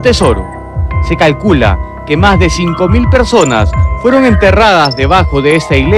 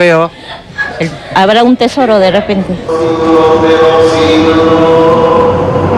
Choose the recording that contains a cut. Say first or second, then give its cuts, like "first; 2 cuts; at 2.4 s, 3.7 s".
second; 1 cut; at 2.4 s